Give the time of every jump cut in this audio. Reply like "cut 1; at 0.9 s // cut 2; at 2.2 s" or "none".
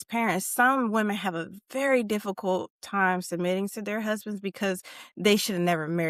none